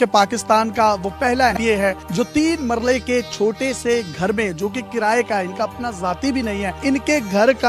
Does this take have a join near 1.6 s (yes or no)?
yes